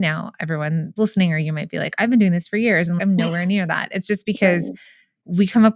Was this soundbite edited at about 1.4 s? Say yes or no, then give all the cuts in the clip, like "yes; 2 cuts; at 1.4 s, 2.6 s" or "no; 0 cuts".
no; 0 cuts